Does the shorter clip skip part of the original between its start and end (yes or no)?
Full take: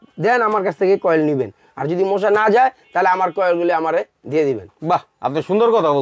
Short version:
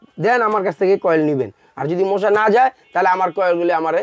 no